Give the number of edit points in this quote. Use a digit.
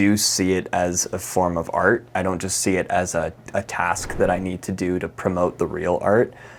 0